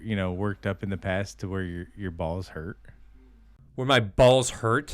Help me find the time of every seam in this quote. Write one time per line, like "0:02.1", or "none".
0:03.8